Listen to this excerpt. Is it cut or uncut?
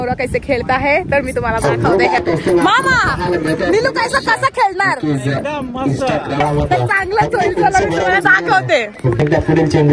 cut